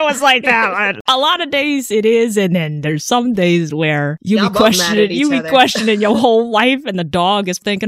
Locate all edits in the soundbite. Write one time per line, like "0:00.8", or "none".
0:01.1
0:04.1